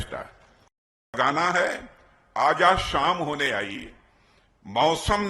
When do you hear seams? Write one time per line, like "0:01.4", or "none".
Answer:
0:01.1